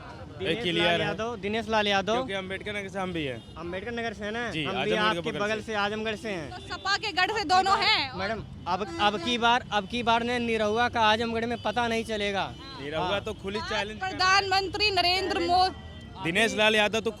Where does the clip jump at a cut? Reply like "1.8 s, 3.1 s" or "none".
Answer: none